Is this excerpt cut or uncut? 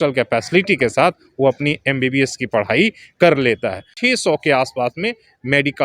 cut